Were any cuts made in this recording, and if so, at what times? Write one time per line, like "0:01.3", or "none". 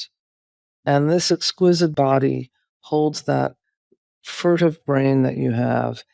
0:01.9